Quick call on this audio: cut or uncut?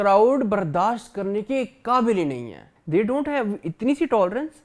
cut